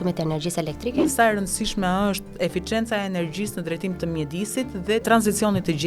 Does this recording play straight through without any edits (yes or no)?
no